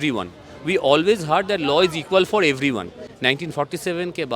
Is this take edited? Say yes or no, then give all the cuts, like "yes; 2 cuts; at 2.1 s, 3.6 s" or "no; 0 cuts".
yes; 1 cut; at 3.0 s